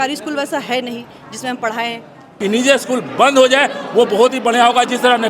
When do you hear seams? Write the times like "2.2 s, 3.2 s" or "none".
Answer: 2.3 s